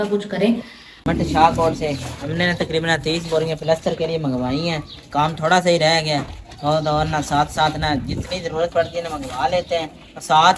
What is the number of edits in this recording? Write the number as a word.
zero